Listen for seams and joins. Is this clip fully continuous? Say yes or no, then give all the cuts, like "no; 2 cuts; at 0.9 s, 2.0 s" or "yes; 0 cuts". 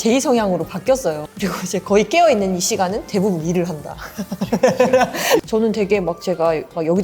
no; 2 cuts; at 1.3 s, 5.4 s